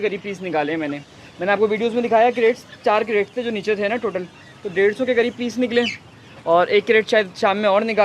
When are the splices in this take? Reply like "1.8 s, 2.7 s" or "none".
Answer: none